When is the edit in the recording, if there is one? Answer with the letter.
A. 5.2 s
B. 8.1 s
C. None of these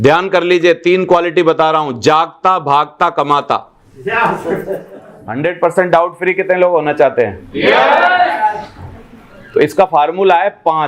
A